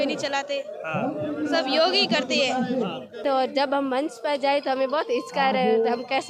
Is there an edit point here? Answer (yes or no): yes